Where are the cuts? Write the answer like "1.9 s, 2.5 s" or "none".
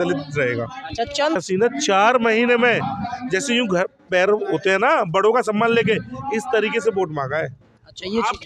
1.4 s